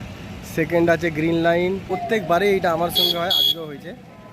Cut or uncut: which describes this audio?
cut